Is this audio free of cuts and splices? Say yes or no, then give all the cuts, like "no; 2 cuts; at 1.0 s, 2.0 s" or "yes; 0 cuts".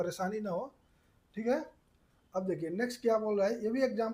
yes; 0 cuts